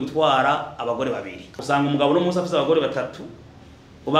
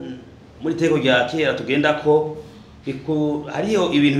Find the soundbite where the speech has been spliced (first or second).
first